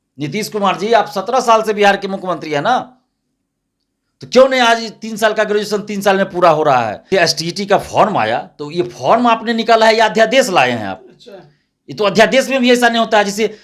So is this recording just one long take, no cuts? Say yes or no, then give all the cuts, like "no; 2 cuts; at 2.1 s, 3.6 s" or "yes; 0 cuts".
no; 1 cut; at 7.0 s